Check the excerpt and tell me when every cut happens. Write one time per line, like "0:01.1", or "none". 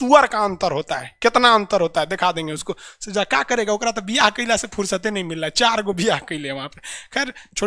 none